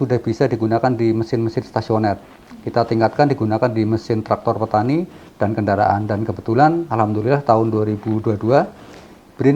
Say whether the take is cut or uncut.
uncut